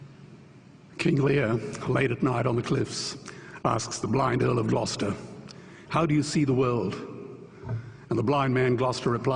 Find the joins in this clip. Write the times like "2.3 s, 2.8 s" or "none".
5.7 s